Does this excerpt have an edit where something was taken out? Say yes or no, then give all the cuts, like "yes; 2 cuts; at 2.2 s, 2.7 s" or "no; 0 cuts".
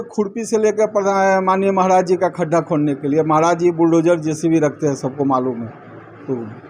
no; 0 cuts